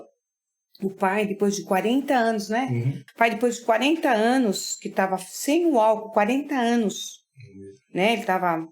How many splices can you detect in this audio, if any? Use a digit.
1